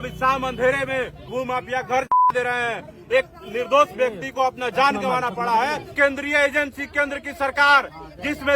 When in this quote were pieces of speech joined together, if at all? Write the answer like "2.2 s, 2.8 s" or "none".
1.2 s, 5.9 s